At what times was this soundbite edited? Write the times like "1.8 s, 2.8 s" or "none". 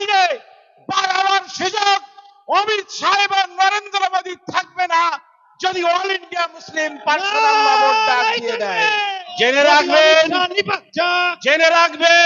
9.2 s